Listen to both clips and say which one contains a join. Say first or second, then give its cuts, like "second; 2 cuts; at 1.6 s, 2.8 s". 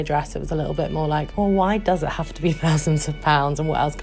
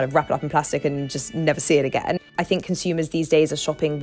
second; 1 cut; at 2.3 s